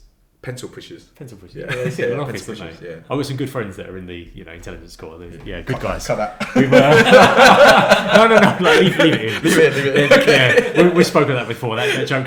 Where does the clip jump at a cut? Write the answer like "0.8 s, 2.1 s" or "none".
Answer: none